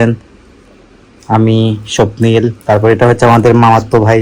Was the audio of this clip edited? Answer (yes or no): no